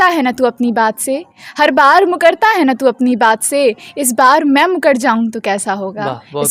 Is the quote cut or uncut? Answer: uncut